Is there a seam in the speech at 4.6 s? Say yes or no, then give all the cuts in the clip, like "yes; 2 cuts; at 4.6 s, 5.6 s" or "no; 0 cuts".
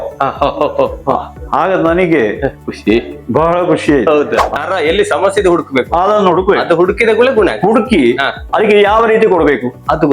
yes; 1 cut; at 4.6 s